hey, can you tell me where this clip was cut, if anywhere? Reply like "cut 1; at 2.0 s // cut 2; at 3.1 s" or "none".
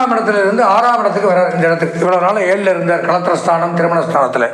none